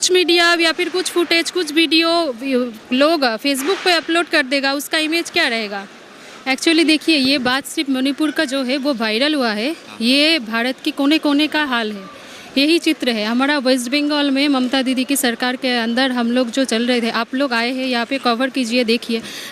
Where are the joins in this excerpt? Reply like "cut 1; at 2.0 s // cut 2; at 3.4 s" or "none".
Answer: cut 1; at 6.3 s

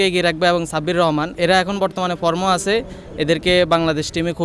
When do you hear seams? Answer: cut 1; at 1.3 s

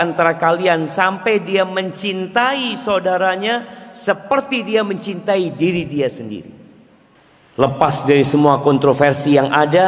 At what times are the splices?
cut 1; at 7.6 s

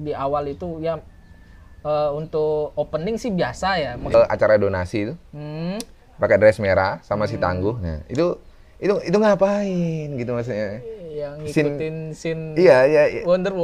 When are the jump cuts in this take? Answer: cut 1; at 4.1 s

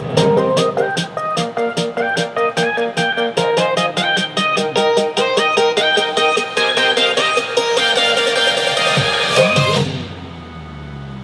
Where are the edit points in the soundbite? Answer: none

